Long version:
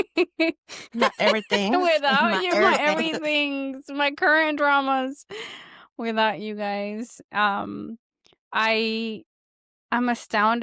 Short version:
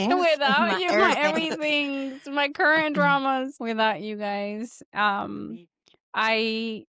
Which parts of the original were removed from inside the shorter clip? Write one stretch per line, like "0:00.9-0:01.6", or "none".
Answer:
0:05.2-0:05.9